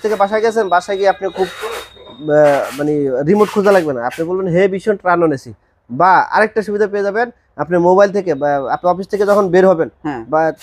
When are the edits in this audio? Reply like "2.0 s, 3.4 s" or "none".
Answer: none